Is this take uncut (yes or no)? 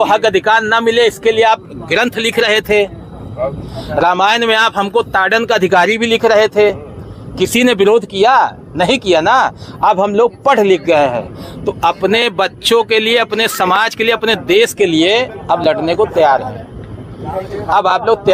yes